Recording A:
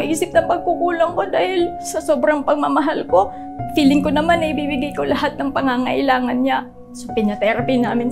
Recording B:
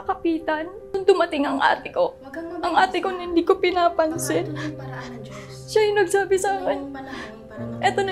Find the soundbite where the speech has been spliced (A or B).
B